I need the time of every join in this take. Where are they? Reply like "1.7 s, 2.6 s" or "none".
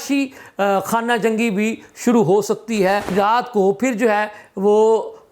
3.1 s